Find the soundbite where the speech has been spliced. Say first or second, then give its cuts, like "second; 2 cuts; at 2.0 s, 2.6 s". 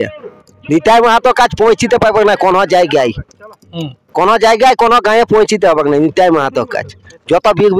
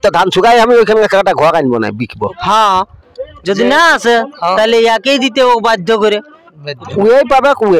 second; 2 cuts; at 2.4 s, 6.8 s